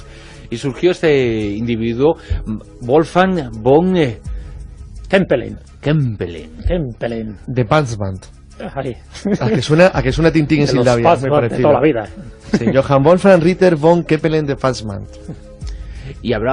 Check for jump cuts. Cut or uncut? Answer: uncut